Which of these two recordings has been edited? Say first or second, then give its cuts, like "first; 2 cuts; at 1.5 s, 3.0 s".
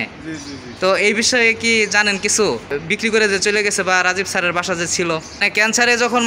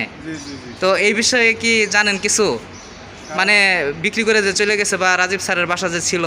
first; 2 cuts; at 2.7 s, 5.4 s